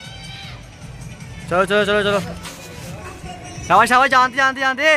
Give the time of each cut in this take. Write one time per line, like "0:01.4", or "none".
0:01.4